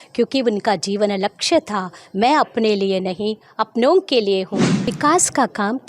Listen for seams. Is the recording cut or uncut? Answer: cut